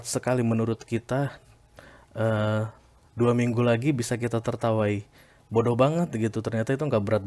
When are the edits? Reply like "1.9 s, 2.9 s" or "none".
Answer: none